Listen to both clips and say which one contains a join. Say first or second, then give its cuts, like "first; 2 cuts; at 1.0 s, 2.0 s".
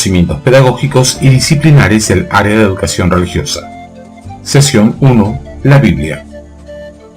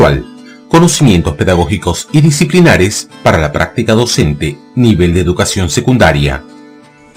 first; 1 cut; at 6.2 s